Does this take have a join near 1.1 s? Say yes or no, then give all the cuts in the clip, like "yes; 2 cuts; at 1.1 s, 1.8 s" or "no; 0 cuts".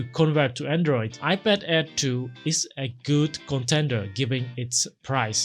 yes; 1 cut; at 1.1 s